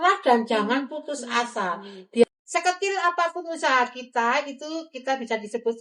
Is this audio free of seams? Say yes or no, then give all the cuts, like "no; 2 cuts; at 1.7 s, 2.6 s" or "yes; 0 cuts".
no; 1 cut; at 2.3 s